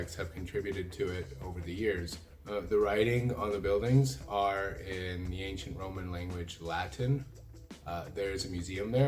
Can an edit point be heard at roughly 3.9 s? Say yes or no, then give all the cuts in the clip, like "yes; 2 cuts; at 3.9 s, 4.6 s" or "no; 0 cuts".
no; 2 cuts; at 2.2 s, 7.7 s